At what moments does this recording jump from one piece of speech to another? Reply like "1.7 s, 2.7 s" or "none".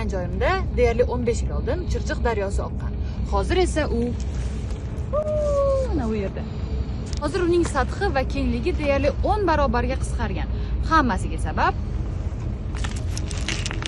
none